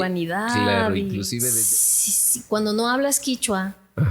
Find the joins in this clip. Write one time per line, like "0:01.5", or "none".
0:01.5